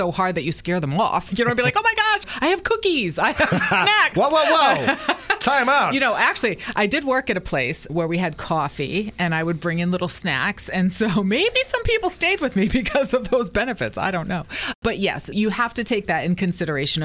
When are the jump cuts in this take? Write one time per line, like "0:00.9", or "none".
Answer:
none